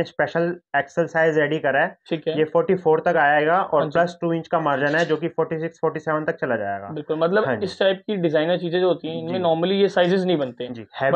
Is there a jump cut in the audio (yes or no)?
no